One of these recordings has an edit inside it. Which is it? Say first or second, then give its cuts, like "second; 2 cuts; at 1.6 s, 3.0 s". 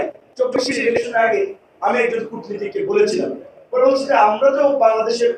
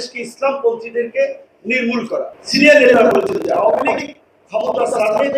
second; 1 cut; at 2.3 s